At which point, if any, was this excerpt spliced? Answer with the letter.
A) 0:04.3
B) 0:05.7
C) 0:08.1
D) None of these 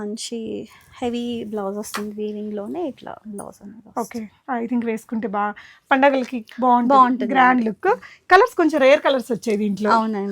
D